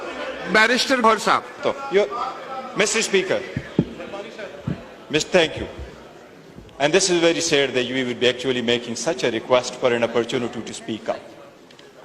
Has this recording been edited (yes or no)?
yes